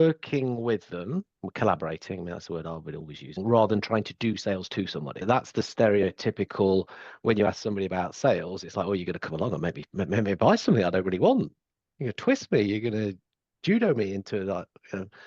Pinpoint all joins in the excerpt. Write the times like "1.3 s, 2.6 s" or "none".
3.4 s, 5.2 s